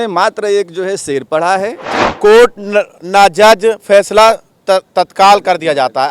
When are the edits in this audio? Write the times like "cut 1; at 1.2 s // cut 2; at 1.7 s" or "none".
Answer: cut 1; at 2.0 s